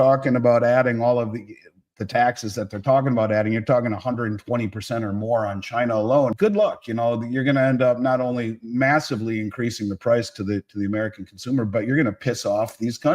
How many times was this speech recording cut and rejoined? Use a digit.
1